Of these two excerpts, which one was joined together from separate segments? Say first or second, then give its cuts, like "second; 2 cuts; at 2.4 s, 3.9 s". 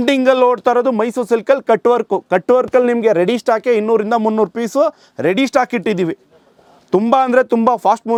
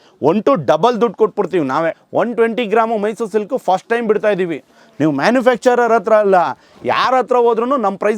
second; 1 cut; at 2.0 s